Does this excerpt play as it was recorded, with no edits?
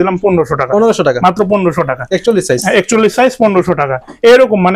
yes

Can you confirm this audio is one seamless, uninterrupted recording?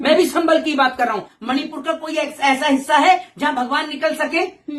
no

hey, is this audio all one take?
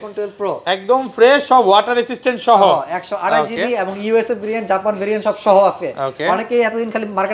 yes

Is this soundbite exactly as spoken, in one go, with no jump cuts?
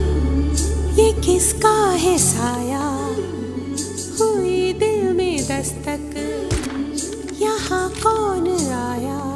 no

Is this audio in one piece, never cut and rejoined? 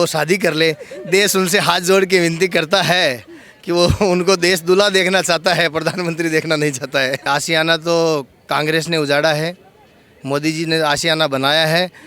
no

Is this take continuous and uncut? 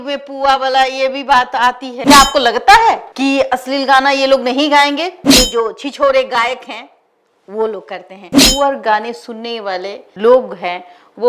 no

